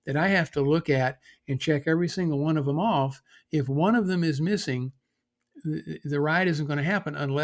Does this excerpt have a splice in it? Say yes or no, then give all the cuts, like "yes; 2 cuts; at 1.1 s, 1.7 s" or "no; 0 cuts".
no; 0 cuts